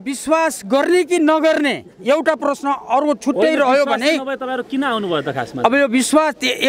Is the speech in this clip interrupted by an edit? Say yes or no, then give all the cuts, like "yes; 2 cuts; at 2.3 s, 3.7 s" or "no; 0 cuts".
no; 0 cuts